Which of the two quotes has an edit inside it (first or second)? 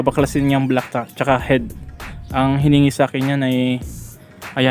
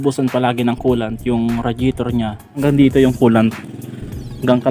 second